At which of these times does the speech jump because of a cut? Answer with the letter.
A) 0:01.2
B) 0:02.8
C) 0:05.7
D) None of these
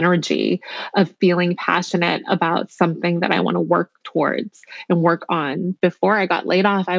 C